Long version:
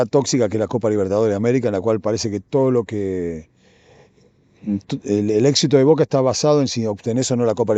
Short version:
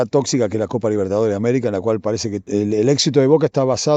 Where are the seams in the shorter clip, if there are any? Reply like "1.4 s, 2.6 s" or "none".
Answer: 2.4 s